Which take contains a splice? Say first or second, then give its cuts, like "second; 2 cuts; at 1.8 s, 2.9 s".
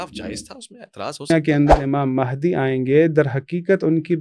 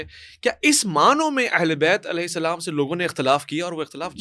first; 1 cut; at 1.3 s